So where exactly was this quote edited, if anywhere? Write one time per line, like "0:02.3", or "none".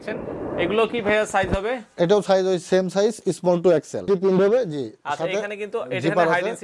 0:04.1